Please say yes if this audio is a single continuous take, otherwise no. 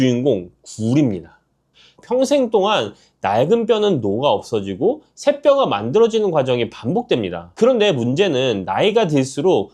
no